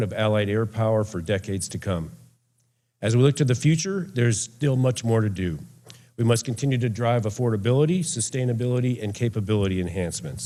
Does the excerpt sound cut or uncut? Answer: uncut